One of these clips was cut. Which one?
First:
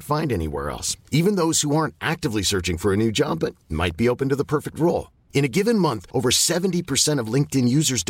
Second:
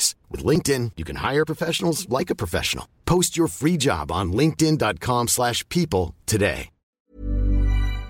second; 1 cut; at 7.0 s

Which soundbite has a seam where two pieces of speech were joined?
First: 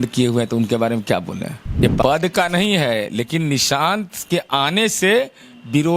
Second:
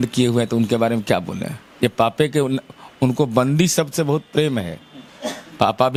first; 1 cut; at 2.0 s

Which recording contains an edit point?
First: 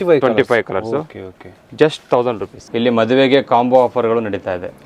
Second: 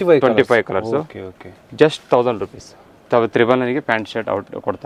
first; 1 cut; at 2.6 s

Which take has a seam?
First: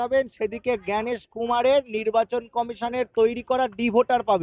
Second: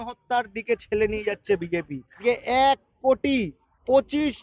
second; 1 cut; at 2.2 s

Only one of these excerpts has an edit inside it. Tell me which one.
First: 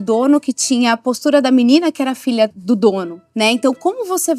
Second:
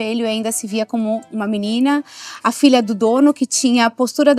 first; 2 cuts; at 2.6 s, 3.2 s

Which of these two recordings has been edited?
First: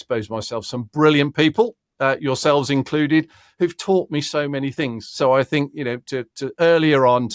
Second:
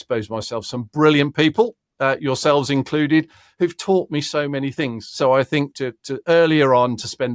second; 1 cut; at 5.7 s

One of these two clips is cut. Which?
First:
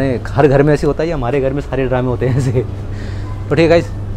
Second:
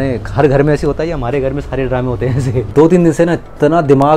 second; 1 cut; at 2.7 s

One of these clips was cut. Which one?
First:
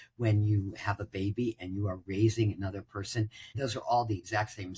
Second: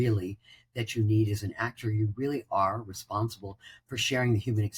first; 1 cut; at 3.6 s

